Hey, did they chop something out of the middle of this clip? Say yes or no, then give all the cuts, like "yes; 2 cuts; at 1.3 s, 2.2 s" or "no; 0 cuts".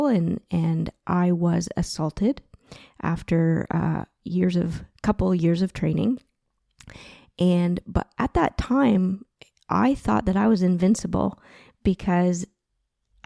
no; 0 cuts